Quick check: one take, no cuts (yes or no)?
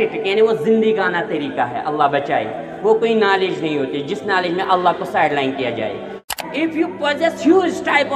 no